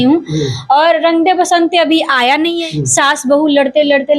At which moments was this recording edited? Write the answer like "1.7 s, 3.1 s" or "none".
2.6 s